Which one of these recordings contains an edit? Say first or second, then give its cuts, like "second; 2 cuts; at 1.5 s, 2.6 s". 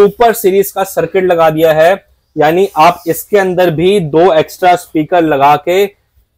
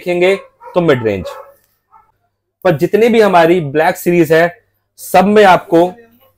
second; 1 cut; at 2.1 s